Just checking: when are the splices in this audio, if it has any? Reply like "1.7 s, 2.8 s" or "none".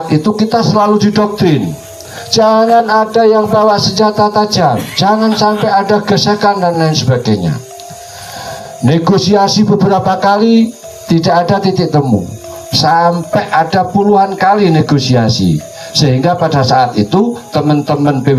none